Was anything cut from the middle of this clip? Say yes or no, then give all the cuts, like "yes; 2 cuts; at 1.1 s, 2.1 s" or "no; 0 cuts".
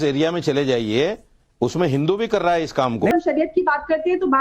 yes; 1 cut; at 3.1 s